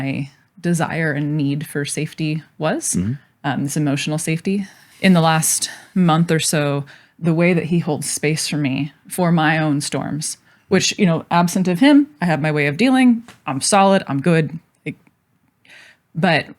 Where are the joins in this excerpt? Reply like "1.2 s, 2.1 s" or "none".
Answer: 4.8 s